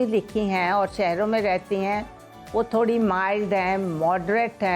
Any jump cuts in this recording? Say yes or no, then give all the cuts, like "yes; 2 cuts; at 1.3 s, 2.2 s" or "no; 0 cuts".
no; 0 cuts